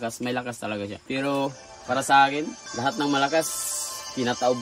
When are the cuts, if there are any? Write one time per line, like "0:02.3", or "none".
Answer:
0:01.0
0:02.6